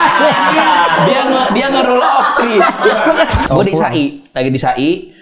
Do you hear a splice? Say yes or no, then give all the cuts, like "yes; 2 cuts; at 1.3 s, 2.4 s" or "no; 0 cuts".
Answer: yes; 1 cut; at 3.4 s